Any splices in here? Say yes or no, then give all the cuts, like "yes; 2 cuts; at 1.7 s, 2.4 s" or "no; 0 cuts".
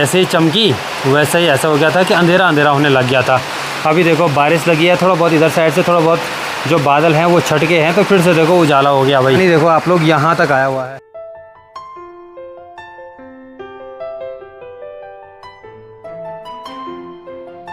no; 0 cuts